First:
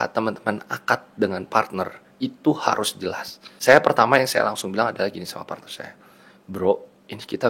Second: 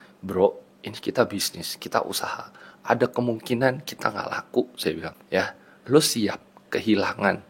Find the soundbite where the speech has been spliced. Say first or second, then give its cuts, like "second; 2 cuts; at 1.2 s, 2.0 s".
first; 1 cut; at 3.5 s